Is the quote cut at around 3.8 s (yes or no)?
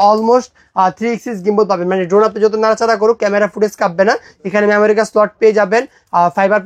no